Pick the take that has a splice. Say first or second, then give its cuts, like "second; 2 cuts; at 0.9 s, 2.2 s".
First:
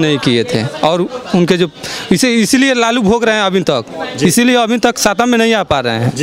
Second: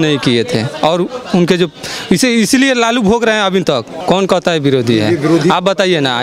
second; 1 cut; at 3.9 s